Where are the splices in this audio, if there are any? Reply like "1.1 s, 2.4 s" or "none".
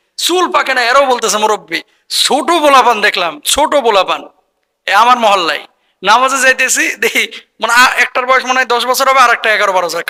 none